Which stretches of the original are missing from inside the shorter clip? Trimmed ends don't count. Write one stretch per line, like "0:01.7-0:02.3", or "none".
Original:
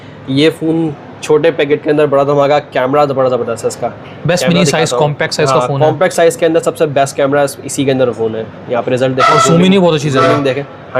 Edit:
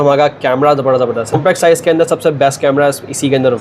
0:03.7-0:05.9